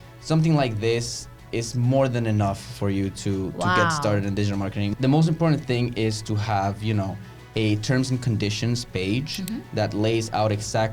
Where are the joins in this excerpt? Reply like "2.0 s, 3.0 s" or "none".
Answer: 4.9 s

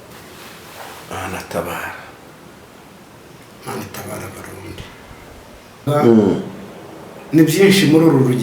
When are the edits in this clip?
5.8 s

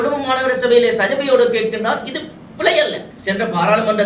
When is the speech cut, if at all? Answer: 3.1 s

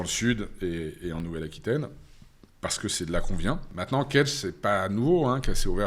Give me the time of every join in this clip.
3.7 s

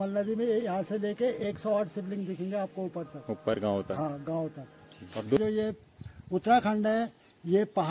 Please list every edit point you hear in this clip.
5.4 s

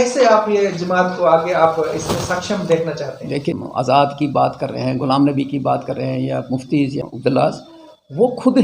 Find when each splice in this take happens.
3.5 s, 7.0 s

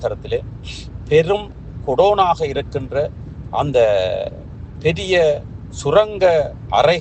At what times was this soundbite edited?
none

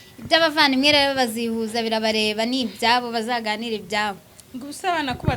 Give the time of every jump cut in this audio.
none

